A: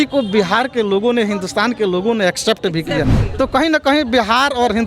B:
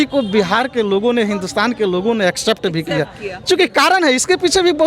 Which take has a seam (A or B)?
A